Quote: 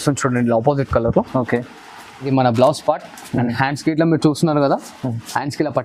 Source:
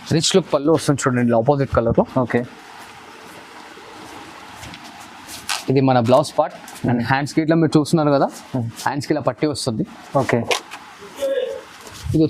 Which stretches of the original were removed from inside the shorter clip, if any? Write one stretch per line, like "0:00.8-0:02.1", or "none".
0:03.1-0:05.8